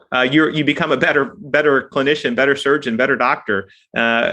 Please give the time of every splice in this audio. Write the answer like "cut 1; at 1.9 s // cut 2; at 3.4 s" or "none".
none